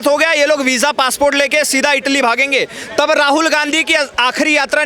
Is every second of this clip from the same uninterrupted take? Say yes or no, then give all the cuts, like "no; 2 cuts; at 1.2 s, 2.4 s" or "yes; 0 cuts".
yes; 0 cuts